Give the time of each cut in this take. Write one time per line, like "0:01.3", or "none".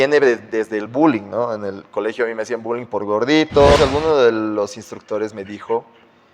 0:03.8